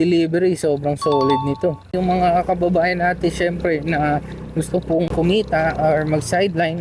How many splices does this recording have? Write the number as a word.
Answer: two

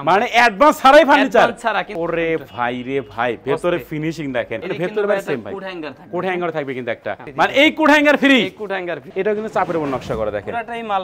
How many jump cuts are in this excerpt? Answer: four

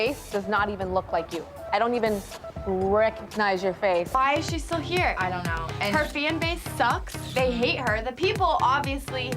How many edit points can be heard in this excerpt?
one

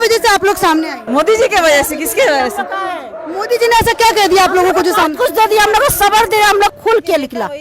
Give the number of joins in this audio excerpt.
two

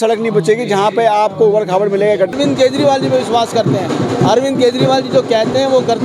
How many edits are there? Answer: one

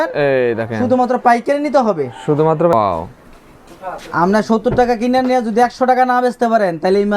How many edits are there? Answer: one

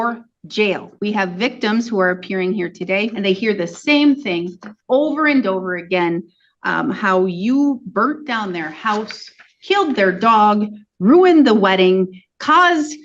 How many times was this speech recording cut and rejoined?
two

